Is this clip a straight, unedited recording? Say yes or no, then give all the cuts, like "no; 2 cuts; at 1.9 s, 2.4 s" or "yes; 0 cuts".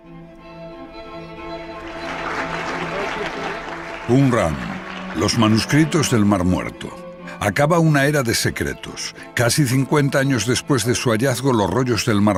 yes; 0 cuts